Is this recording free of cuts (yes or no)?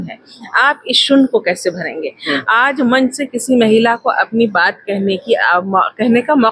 yes